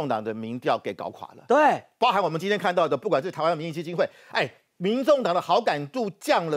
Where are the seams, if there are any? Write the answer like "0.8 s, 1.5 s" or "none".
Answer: none